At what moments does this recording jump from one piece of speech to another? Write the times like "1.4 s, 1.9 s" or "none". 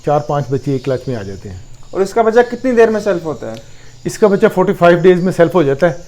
none